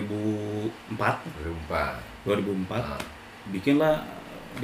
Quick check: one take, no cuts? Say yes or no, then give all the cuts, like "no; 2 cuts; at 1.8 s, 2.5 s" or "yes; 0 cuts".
no; 2 cuts; at 0.8 s, 3.4 s